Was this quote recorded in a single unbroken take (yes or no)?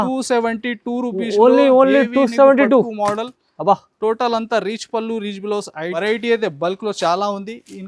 no